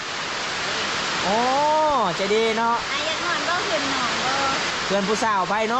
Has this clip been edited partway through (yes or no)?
yes